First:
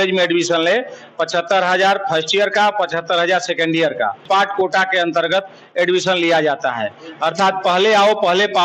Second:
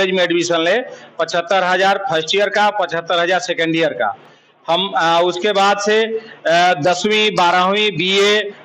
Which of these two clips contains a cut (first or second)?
first